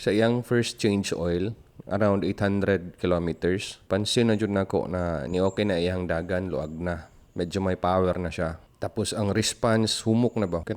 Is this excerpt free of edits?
yes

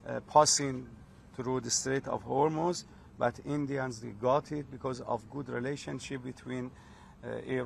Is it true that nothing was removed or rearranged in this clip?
yes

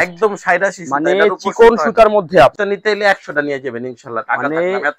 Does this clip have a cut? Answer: yes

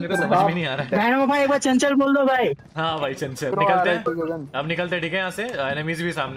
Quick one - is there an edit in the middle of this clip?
yes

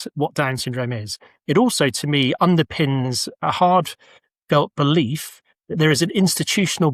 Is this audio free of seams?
yes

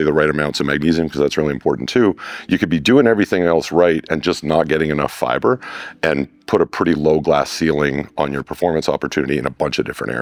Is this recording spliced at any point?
no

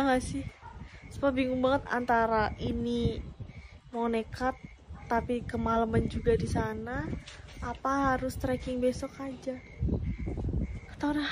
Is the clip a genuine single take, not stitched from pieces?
yes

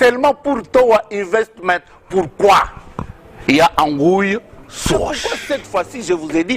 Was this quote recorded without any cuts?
no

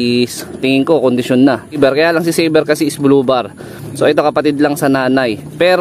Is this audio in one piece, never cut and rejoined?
no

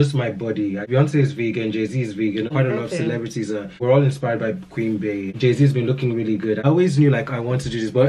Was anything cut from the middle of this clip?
yes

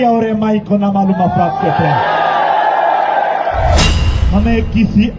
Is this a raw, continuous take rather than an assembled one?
no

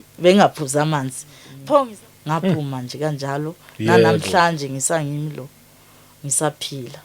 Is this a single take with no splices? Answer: no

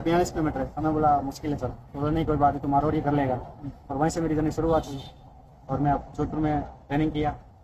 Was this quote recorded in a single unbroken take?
yes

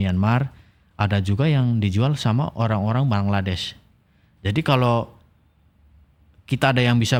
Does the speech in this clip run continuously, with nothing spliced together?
yes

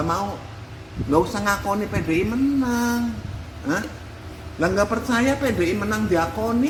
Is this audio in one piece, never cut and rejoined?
yes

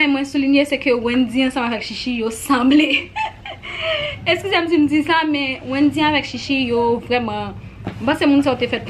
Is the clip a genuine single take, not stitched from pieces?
yes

